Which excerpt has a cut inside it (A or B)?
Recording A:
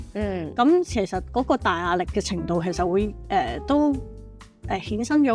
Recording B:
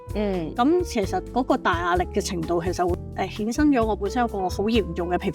B